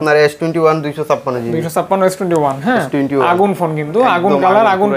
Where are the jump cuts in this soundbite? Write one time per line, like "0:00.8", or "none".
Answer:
none